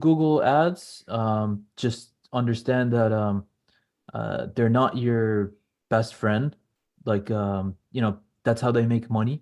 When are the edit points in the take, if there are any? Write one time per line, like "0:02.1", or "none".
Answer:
none